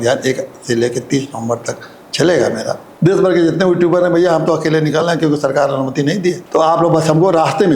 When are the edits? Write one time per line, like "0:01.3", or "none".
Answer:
0:02.8
0:06.4